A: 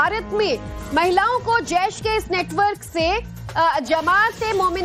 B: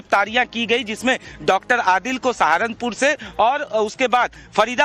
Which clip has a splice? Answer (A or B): A